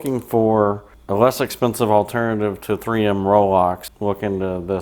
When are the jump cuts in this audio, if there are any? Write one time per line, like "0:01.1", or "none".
0:00.9
0:03.9

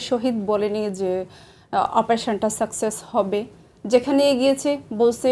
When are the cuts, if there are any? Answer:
none

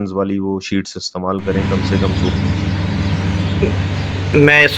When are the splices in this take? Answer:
0:01.7

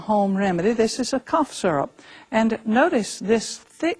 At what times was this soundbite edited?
0:02.9

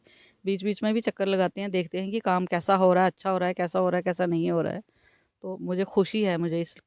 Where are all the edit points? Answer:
none

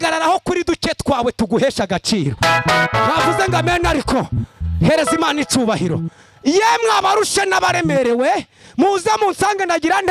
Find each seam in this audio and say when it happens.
none

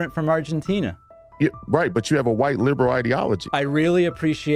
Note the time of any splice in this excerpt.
0:03.5

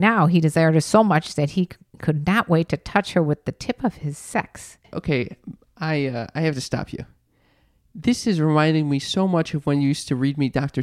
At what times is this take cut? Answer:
0:04.8

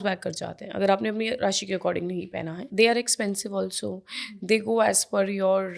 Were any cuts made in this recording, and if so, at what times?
0:02.6

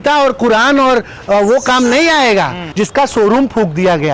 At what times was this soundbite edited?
0:02.6

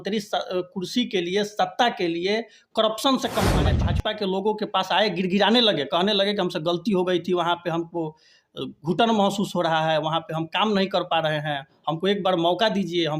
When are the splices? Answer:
0:03.9

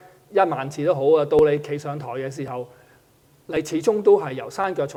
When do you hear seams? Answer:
none

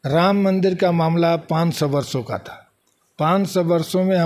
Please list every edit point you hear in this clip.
none

